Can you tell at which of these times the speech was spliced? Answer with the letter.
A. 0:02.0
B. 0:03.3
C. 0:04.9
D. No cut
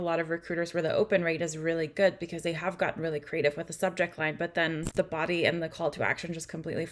C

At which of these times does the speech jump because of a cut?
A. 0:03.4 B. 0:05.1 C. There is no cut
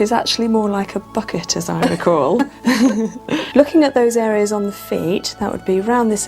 A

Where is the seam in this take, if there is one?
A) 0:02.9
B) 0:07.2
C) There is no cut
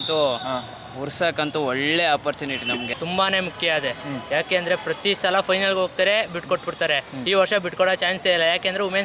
A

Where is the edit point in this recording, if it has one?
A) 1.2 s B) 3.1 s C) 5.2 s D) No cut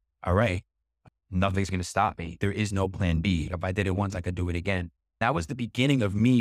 C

